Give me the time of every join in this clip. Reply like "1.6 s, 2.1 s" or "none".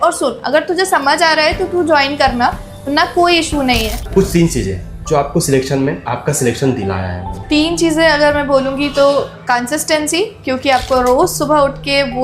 4.0 s, 7.3 s